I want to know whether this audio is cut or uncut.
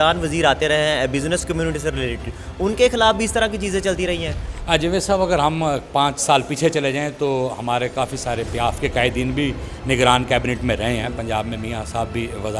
uncut